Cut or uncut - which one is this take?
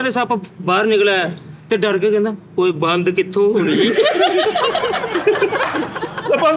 uncut